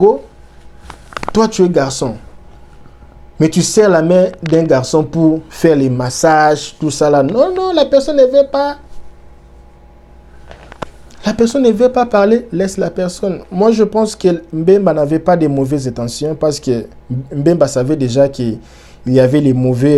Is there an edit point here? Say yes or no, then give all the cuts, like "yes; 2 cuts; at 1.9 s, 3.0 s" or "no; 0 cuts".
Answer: no; 0 cuts